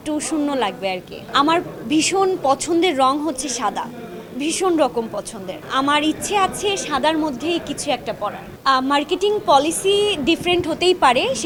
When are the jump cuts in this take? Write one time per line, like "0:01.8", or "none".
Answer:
none